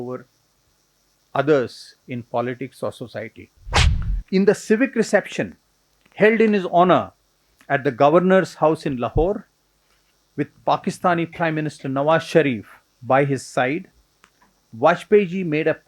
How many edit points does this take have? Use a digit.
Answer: 1